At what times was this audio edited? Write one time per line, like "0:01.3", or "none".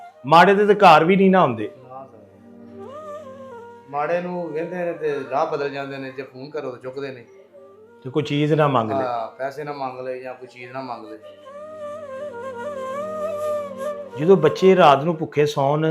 0:14.1